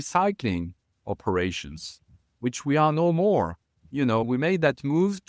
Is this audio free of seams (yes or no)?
yes